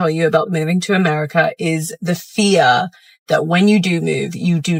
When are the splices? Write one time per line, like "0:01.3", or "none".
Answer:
none